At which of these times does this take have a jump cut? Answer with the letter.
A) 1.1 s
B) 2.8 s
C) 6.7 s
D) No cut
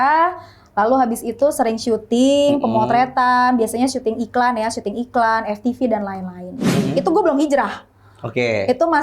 C